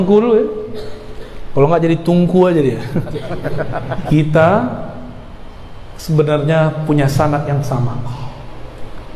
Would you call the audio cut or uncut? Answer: cut